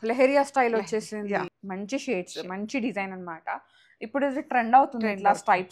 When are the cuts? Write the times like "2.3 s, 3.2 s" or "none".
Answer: 1.6 s